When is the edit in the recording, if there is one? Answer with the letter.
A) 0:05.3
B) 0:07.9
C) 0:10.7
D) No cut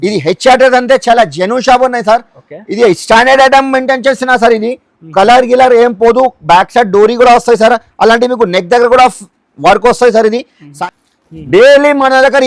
C